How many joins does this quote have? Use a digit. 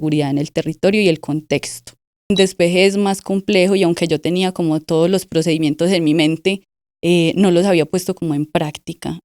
1